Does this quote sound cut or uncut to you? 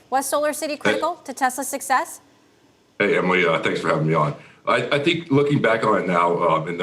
uncut